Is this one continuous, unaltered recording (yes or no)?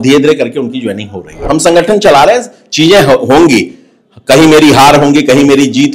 no